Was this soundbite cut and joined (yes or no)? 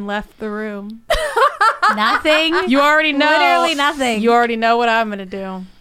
no